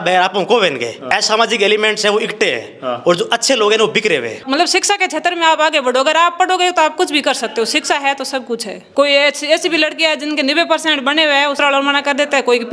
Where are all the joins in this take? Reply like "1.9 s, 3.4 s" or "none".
1.0 s, 4.4 s, 8.8 s, 11.6 s